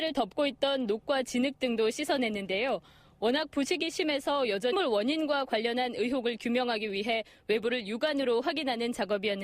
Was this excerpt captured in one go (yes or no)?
yes